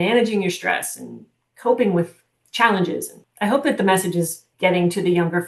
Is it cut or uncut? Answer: cut